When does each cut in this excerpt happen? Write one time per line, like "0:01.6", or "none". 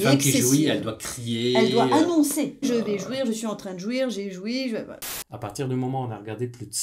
0:02.7
0:05.0